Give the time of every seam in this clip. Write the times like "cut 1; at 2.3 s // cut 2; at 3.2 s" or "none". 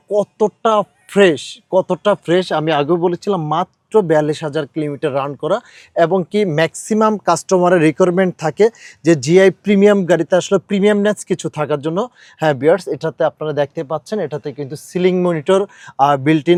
none